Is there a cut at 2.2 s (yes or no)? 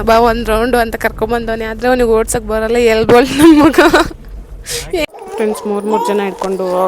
no